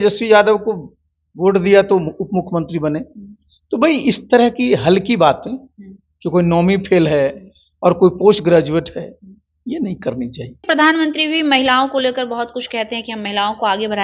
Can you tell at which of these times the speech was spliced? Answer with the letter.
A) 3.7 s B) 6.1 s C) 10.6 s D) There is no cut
C